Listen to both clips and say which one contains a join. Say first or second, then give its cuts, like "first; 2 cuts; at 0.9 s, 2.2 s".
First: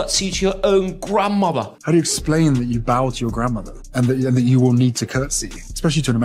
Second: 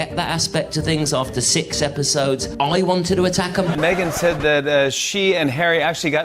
second; 1 cut; at 3.7 s